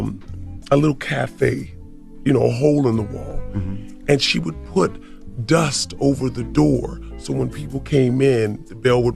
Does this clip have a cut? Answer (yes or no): no